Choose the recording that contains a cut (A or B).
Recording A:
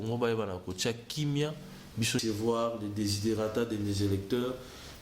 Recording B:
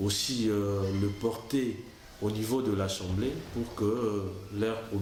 A